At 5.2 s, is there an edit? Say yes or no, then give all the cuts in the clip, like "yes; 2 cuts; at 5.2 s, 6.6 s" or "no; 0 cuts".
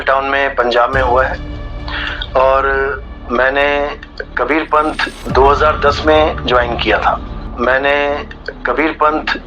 no; 1 cut; at 7.3 s